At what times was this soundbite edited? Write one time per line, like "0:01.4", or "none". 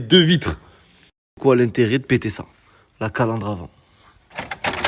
0:01.3